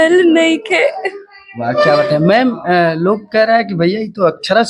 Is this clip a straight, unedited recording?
yes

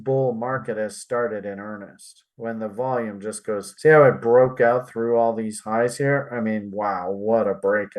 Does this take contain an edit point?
yes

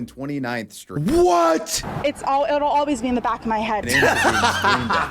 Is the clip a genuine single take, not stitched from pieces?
no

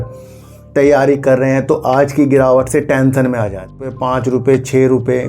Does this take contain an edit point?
yes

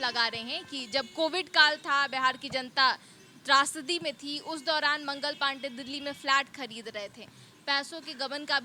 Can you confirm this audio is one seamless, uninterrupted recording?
yes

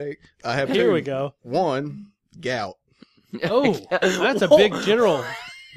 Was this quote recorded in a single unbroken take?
no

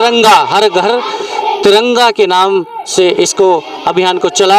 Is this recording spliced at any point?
no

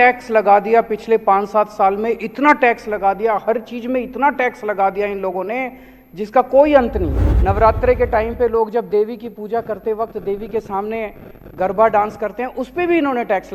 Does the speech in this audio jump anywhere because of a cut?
yes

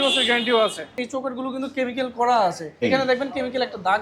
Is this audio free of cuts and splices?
no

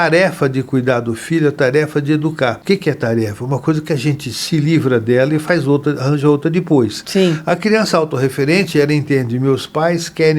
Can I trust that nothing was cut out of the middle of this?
no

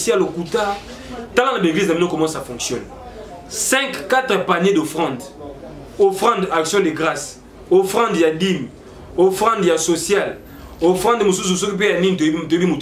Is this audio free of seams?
yes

